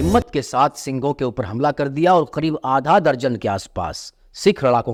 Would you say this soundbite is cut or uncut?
uncut